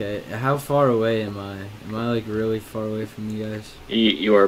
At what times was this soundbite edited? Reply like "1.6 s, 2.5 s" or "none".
none